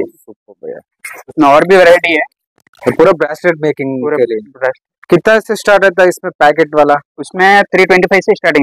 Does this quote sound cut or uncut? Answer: uncut